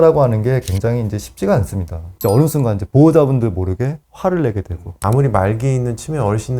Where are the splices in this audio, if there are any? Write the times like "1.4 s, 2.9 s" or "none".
2.1 s, 5.0 s